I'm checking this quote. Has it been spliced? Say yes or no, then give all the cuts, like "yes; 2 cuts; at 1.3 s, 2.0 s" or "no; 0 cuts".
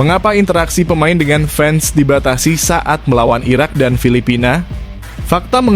no; 0 cuts